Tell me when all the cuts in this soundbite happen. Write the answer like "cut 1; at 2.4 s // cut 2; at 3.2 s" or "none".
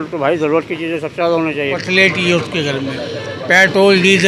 cut 1; at 1.7 s